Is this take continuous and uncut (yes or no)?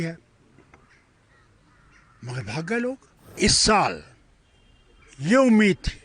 no